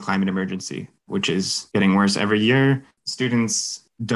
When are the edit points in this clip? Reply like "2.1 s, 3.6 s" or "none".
1.3 s